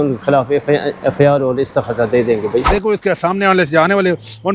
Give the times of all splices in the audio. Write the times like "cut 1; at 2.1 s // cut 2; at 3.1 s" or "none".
cut 1; at 2.7 s